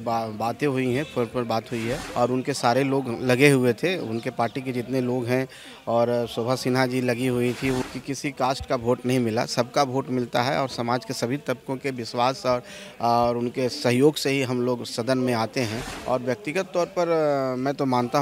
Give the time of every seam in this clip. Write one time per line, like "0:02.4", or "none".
0:02.0
0:07.8
0:15.9

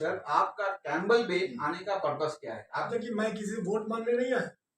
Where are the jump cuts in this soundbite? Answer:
0:02.9

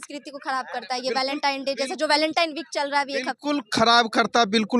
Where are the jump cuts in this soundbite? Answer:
none

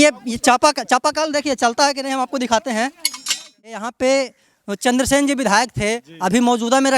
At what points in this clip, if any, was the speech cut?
0:03.6

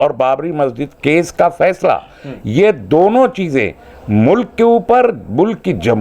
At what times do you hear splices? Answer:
0:00.9

